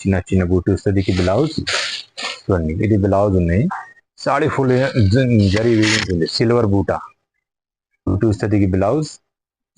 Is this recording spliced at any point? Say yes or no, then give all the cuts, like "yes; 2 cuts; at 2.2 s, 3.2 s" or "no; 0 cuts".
yes; 1 cut; at 8.2 s